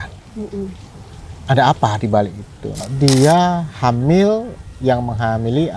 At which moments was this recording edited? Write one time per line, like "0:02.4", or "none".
0:02.8